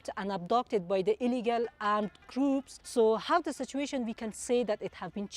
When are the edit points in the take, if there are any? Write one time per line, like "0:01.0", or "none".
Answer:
0:02.8